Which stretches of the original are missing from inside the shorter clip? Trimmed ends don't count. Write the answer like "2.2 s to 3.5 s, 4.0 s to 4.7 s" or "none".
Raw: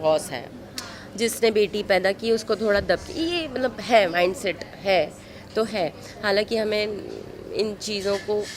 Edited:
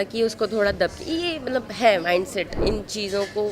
4.6 s to 7.5 s